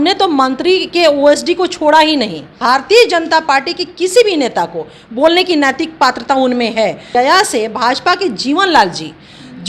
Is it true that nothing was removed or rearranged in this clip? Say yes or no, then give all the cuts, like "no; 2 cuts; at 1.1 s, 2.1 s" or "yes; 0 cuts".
no; 2 cuts; at 2.6 s, 7.0 s